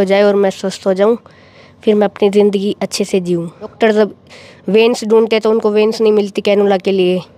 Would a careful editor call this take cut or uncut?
cut